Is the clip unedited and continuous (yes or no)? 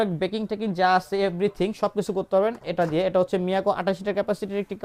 yes